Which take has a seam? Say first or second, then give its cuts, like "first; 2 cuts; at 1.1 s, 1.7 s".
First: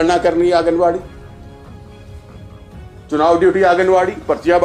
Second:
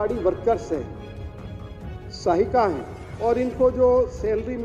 second; 1 cut; at 3.0 s